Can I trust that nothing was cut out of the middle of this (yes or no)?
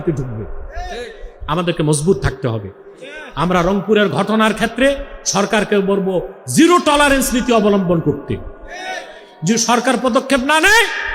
yes